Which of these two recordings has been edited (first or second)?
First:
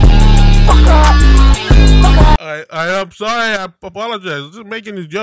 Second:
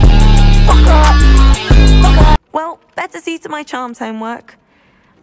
second